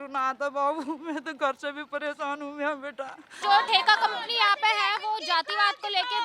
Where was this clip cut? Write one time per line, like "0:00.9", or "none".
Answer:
0:03.4